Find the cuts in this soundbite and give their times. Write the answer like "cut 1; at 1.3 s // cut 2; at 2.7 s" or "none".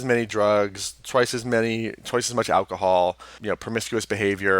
cut 1; at 3.3 s

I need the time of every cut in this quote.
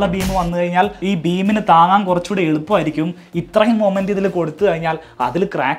cut 1; at 1.0 s

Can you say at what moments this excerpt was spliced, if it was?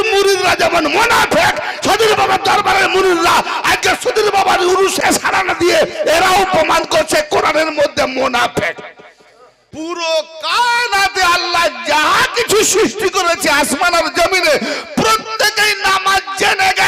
cut 1; at 5.0 s // cut 2; at 9.6 s

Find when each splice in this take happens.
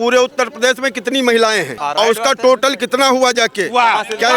cut 1; at 1.7 s

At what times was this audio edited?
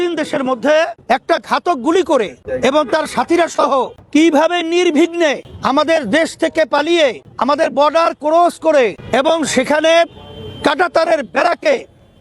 cut 1; at 1.0 s // cut 2; at 2.4 s // cut 3; at 4.0 s // cut 4; at 5.5 s // cut 5; at 7.3 s // cut 6; at 9.0 s

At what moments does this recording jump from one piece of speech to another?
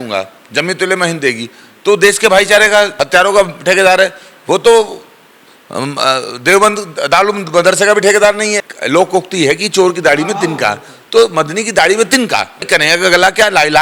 cut 1; at 2.9 s // cut 2; at 8.7 s // cut 3; at 12.7 s

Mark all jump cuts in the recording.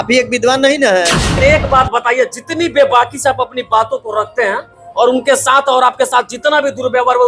cut 1; at 1.4 s

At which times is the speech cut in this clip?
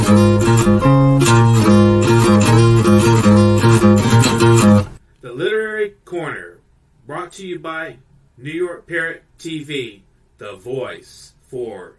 none

